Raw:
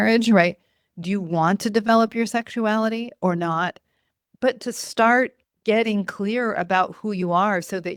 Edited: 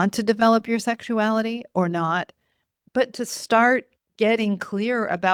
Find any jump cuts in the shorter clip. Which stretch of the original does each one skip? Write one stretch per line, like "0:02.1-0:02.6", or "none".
none